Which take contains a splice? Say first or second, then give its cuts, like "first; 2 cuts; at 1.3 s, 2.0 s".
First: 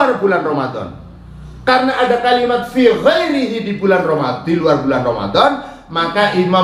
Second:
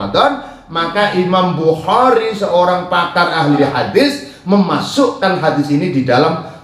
second; 1 cut; at 3.6 s